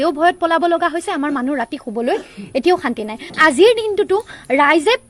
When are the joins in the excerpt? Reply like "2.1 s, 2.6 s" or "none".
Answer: 3.3 s